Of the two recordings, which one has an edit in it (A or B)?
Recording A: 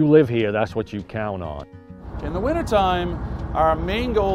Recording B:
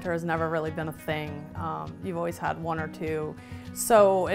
A